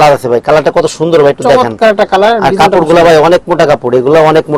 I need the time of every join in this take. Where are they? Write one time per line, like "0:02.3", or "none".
none